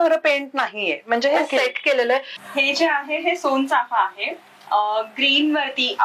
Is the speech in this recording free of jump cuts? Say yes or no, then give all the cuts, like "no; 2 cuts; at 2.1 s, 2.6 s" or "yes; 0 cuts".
no; 1 cut; at 2.4 s